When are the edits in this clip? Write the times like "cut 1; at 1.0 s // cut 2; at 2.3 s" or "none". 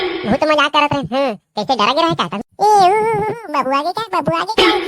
cut 1; at 2.3 s